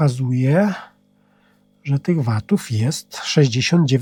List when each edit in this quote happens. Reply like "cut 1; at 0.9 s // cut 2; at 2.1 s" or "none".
none